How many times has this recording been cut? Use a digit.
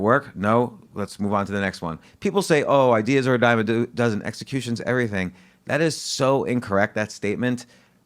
1